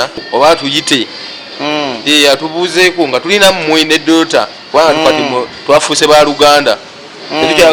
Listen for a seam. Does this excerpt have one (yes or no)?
no